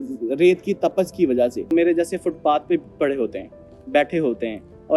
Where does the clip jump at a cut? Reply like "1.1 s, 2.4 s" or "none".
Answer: 1.7 s